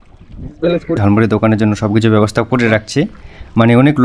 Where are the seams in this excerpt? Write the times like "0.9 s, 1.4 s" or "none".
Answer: 1.0 s